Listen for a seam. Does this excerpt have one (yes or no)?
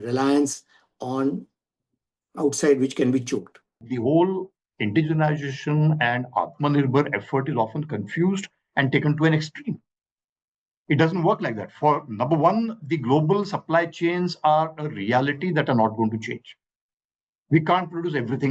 yes